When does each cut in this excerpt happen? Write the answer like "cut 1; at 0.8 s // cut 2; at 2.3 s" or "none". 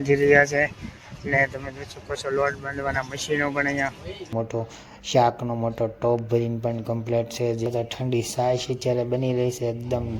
cut 1; at 4.3 s // cut 2; at 7.7 s